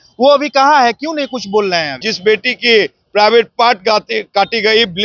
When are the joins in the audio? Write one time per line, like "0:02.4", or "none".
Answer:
0:02.1